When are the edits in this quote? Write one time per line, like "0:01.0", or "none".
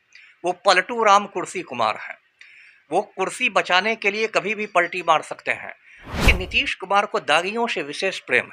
0:06.2